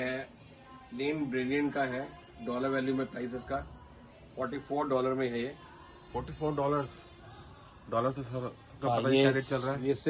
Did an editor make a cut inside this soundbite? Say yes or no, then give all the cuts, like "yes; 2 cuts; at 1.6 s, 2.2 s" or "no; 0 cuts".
no; 0 cuts